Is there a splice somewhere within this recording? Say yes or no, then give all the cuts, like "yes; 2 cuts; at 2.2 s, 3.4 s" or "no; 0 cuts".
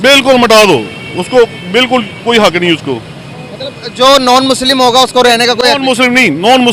no; 0 cuts